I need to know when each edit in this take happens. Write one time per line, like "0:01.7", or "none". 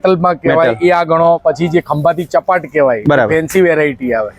none